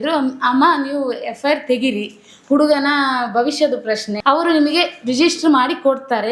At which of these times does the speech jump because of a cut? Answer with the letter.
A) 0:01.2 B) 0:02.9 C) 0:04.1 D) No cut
C